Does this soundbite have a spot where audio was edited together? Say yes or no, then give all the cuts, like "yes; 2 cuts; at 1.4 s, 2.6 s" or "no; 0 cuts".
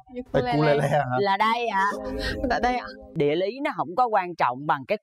yes; 1 cut; at 3.1 s